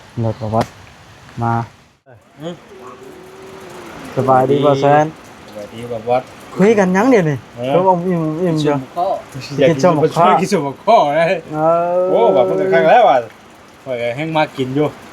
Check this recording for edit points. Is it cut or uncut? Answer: cut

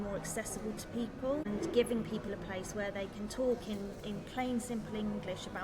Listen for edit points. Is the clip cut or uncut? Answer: cut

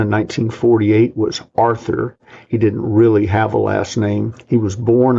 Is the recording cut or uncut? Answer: uncut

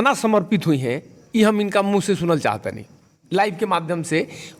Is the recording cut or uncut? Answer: uncut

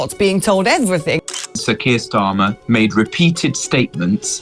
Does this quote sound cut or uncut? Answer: cut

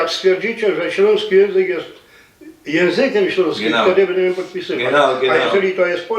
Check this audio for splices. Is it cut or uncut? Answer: uncut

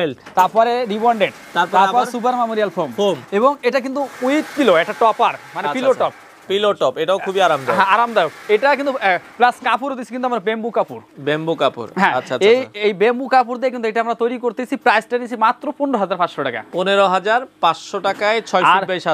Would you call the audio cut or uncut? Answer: uncut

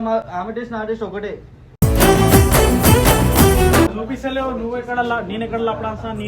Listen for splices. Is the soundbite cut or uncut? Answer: cut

